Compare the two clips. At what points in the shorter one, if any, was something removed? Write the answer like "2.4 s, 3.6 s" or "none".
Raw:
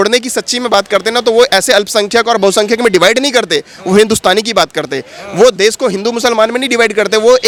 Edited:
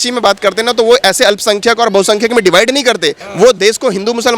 3.2 s